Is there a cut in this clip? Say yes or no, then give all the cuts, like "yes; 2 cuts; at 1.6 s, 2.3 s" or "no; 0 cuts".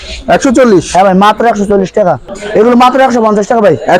yes; 1 cut; at 2.3 s